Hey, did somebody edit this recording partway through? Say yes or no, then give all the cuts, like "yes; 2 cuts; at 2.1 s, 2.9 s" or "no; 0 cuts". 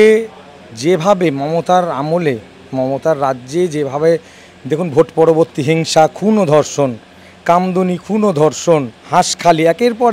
no; 0 cuts